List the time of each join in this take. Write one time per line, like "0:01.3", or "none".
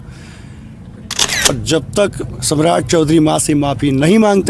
0:01.5